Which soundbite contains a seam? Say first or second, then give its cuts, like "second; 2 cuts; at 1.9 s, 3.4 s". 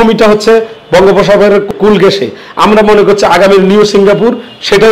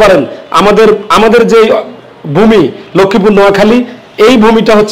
first; 1 cut; at 1.7 s